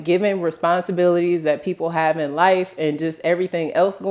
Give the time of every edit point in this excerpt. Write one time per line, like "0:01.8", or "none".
none